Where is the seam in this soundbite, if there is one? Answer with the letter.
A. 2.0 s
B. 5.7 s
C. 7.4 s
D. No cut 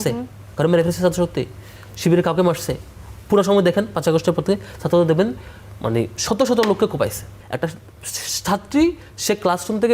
C